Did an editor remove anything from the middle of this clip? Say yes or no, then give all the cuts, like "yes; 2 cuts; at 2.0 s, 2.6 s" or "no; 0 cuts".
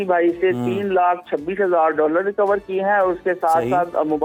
no; 0 cuts